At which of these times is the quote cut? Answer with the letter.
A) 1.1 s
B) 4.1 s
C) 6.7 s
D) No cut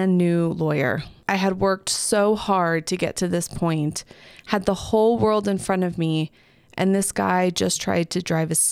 A